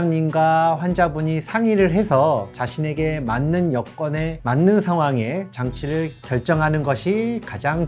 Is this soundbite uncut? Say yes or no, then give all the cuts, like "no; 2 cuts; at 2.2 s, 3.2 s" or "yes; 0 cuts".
yes; 0 cuts